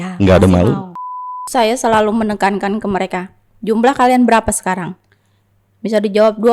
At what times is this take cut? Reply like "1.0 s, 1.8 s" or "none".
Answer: 1.1 s